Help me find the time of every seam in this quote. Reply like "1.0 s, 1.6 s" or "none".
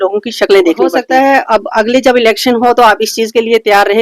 1.0 s

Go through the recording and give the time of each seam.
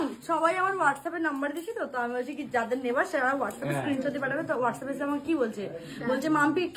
none

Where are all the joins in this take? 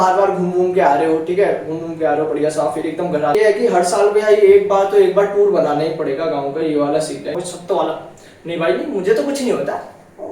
3.3 s, 7.4 s

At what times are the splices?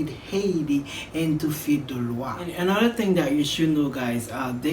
2.5 s

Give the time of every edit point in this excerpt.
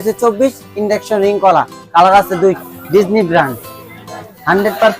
2.7 s

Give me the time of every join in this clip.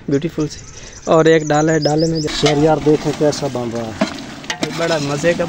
2.3 s

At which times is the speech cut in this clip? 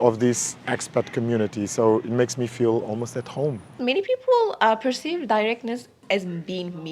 3.8 s, 6.0 s

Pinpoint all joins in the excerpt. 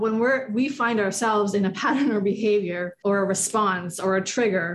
2.9 s

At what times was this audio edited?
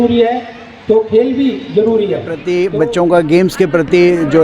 2.3 s

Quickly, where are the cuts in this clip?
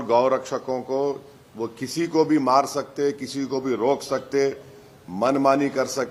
none

